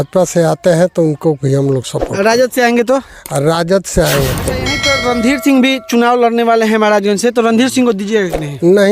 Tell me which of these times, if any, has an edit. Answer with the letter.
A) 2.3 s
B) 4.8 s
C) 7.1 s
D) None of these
B